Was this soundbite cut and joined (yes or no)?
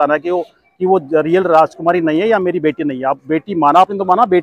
no